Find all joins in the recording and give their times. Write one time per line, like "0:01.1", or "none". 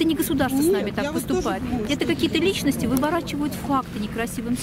none